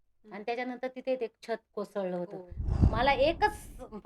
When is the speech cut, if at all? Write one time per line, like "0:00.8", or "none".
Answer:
0:02.7